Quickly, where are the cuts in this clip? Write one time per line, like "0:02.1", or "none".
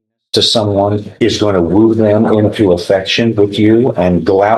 0:01.1